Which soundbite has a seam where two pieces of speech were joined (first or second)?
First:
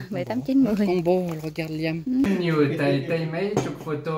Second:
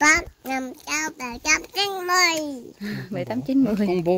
first